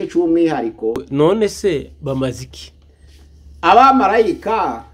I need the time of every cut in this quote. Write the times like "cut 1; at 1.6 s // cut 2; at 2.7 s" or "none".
cut 1; at 1.0 s